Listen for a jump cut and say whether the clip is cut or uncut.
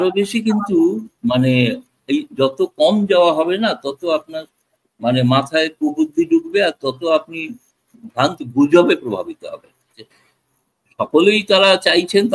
cut